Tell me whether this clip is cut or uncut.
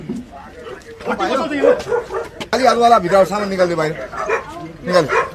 cut